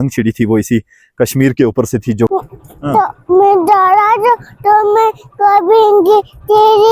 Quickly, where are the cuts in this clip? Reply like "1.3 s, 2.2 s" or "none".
2.3 s

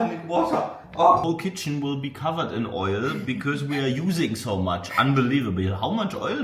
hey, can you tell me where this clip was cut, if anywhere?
1.2 s

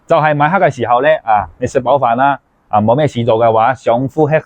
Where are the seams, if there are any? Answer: none

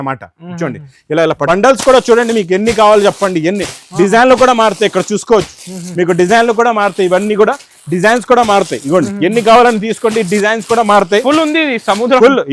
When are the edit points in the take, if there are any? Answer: 1.4 s

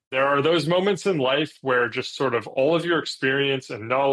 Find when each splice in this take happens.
none

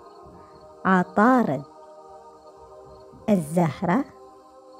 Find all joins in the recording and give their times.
0.7 s, 1.6 s, 3.0 s, 4.1 s

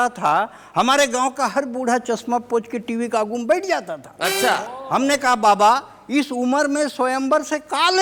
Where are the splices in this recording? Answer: none

